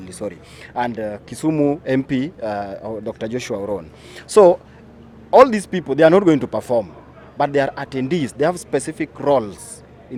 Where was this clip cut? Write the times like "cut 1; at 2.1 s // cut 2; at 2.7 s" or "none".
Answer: none